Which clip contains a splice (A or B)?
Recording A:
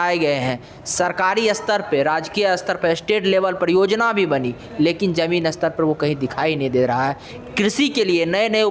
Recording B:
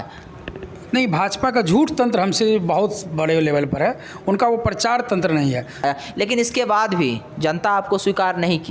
B